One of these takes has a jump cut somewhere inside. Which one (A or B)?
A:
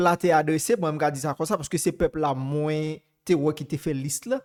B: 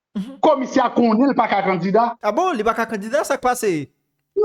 B